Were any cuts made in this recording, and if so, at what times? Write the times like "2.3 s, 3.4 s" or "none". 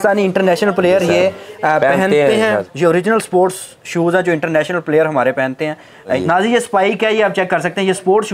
2.7 s, 6.2 s

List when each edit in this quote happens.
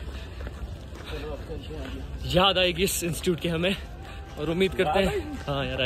none

